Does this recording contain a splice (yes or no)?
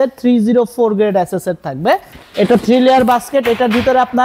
yes